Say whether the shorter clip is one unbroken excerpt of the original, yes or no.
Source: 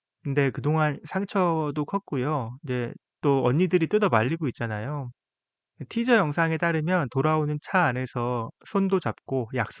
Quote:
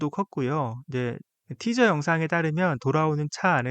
no